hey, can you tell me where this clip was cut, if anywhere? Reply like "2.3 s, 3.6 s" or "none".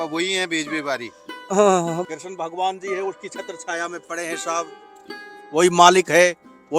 2.0 s